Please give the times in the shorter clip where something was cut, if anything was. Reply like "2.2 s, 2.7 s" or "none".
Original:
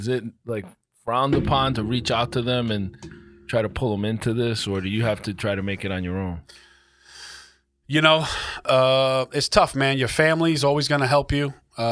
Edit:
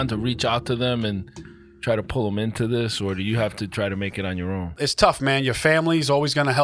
4.8 s